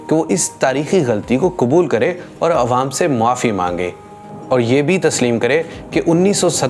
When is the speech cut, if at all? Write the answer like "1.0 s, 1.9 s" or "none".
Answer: none